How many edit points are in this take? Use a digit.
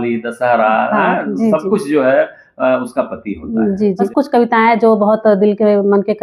1